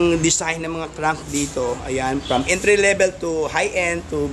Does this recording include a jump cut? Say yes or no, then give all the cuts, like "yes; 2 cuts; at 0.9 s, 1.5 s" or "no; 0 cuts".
no; 0 cuts